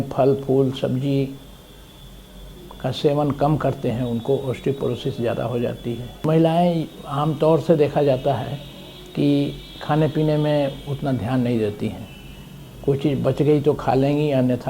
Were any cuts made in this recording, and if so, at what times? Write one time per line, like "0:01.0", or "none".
0:06.2

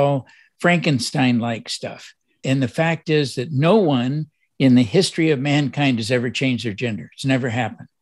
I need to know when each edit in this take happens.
0:02.4

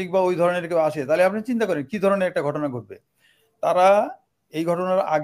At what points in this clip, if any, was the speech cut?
none

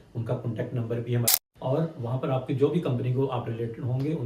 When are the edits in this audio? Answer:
0:01.3

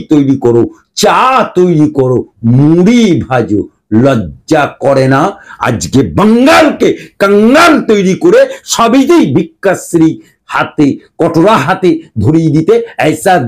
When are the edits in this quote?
none

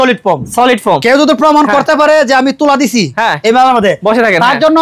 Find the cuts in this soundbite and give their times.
none

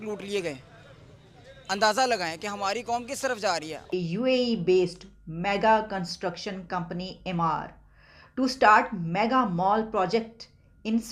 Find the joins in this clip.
0:03.8

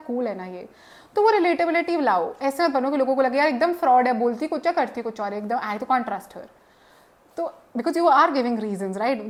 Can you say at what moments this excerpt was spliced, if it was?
none

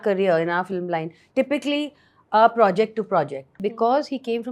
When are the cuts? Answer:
0:03.6

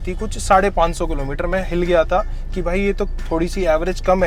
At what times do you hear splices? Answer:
none

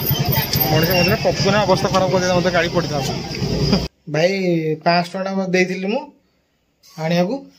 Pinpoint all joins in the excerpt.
0:03.9

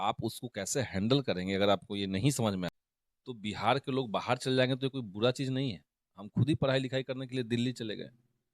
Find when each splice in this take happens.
0:02.7

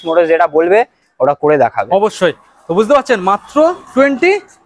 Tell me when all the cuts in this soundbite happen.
none

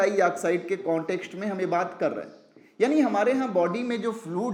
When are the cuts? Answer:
none

